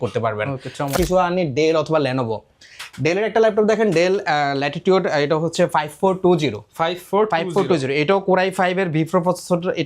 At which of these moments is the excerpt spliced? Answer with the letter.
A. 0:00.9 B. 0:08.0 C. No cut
A